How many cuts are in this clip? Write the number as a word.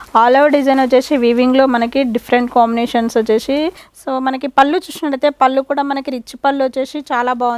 one